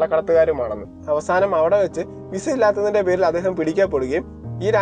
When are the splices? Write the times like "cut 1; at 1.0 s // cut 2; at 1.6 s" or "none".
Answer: cut 1; at 0.9 s